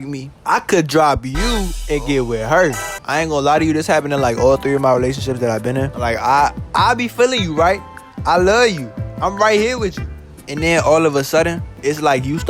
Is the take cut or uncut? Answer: cut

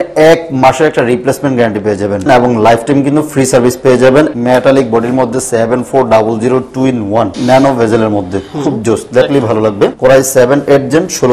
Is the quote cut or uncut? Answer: cut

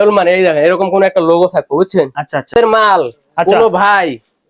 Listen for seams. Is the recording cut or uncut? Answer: cut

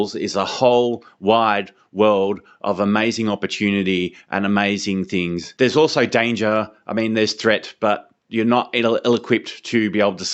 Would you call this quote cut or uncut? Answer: uncut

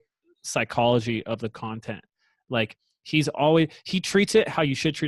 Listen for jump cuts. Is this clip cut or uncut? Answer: uncut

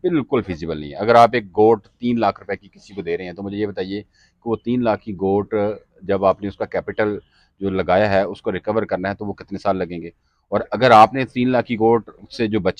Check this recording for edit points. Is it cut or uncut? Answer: uncut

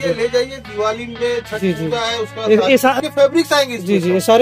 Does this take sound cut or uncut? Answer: cut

